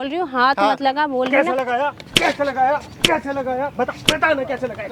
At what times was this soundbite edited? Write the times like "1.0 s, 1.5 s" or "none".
none

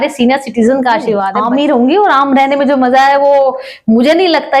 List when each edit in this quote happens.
1.2 s

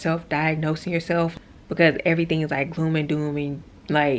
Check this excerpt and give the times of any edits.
1.2 s

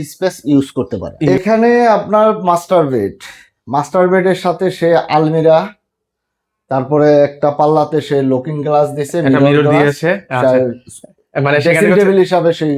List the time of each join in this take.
1.1 s

